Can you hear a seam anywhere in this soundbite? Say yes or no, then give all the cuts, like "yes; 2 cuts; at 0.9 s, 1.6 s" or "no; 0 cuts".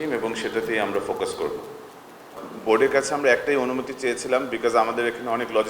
yes; 1 cut; at 2.3 s